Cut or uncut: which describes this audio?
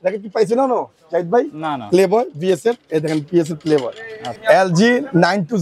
cut